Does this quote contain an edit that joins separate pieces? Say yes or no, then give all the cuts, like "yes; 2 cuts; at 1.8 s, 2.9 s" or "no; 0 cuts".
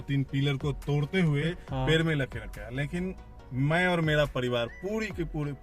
yes; 1 cut; at 1.6 s